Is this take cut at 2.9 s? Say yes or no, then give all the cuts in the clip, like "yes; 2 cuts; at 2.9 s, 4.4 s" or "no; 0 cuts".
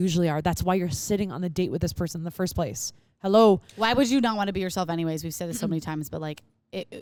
no; 0 cuts